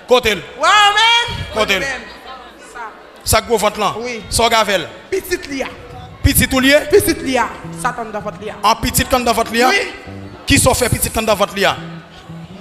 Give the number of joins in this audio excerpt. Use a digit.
0